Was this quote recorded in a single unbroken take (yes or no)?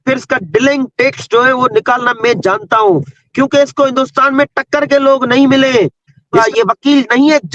no